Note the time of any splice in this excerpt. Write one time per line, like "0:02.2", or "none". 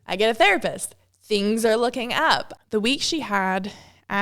0:02.5